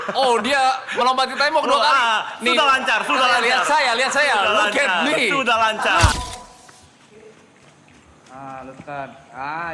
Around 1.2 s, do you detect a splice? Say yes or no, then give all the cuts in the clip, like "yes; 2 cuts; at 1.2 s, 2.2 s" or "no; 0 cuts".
no; 1 cut; at 6.1 s